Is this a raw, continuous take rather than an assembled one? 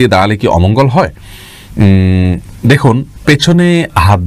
yes; 0 cuts

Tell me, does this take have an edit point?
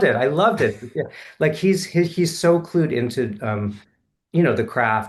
no; 0 cuts

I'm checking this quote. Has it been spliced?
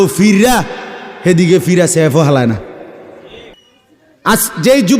yes; 1 cut; at 3.6 s

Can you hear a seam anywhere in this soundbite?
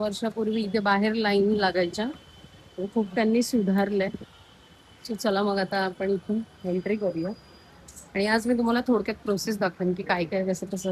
no; 0 cuts

